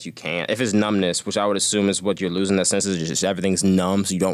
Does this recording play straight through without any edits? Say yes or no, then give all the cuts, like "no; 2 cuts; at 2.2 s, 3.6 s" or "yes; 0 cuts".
yes; 0 cuts